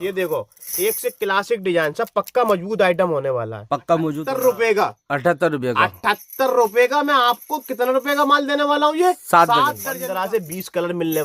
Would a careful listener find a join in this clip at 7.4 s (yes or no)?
no